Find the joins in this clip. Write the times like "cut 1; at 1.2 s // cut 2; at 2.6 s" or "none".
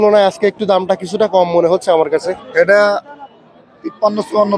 cut 1; at 2.4 s